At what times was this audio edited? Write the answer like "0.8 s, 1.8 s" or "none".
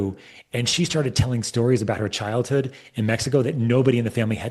none